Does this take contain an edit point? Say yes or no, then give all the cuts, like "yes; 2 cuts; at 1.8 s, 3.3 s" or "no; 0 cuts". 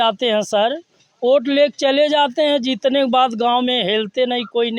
no; 0 cuts